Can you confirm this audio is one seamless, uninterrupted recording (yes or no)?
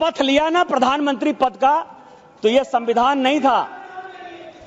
yes